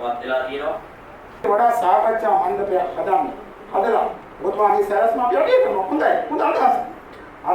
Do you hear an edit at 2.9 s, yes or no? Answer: no